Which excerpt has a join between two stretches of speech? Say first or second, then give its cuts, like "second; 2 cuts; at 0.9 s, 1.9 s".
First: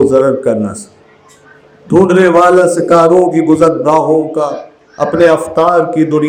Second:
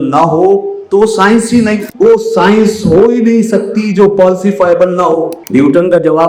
second; 2 cuts; at 1.9 s, 5.4 s